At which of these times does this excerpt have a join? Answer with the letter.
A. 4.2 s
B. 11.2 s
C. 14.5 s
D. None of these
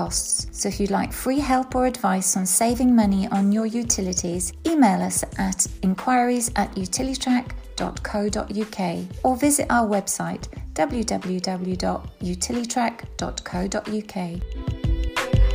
C